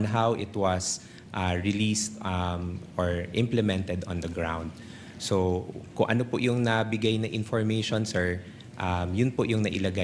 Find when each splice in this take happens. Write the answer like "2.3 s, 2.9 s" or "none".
none